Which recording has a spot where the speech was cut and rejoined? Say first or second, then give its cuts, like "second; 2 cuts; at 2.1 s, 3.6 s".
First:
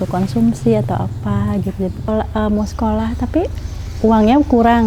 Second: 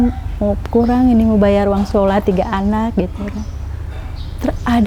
first; 1 cut; at 2.1 s